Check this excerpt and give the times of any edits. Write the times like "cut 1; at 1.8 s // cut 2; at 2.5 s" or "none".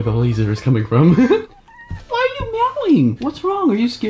cut 1; at 2.1 s // cut 2; at 3.3 s